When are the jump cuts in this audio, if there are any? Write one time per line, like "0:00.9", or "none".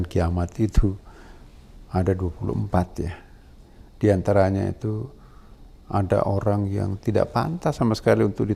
none